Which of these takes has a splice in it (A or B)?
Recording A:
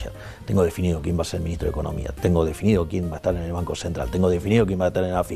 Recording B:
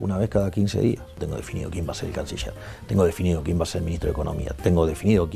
B